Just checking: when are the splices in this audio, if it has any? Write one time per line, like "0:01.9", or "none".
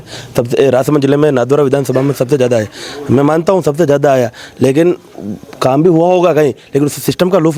none